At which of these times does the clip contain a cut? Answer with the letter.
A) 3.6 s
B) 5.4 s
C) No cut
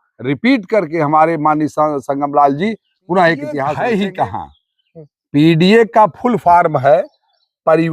A